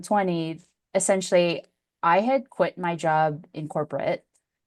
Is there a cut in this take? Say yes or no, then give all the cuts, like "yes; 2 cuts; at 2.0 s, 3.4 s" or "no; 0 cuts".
no; 0 cuts